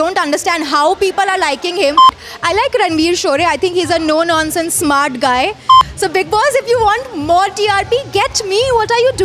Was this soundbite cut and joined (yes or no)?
yes